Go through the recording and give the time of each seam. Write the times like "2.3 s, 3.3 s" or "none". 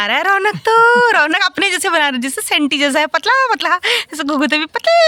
none